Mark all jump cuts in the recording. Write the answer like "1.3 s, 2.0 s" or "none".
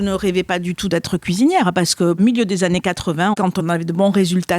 0.9 s, 2.2 s, 3.5 s